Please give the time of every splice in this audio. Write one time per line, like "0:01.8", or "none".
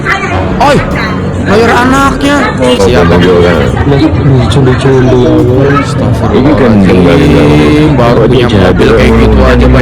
0:02.8